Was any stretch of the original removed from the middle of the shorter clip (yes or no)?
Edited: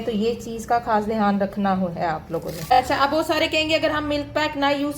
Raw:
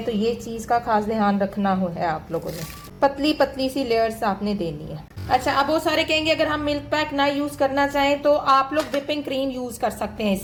yes